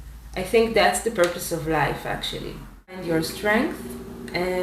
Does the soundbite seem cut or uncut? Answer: cut